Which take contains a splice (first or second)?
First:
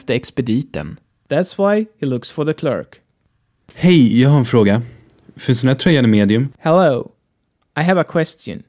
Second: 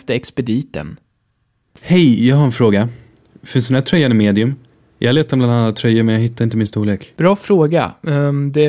second